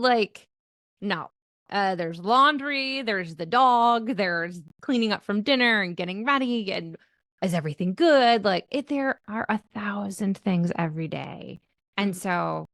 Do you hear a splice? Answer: no; 0 cuts

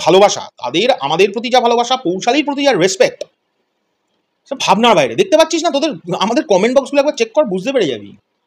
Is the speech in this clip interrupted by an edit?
no; 0 cuts

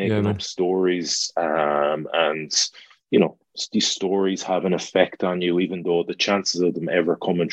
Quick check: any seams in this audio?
no; 0 cuts

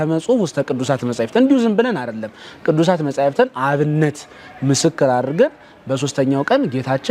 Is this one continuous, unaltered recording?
yes; 0 cuts

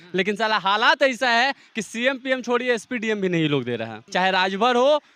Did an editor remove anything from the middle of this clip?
yes; 1 cut; at 4.0 s

